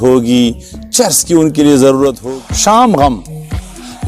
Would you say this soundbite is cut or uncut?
cut